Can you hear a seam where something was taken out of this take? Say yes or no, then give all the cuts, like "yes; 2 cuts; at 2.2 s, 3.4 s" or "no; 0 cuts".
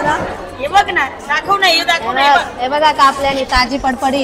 no; 0 cuts